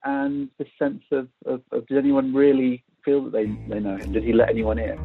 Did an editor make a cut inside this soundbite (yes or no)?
no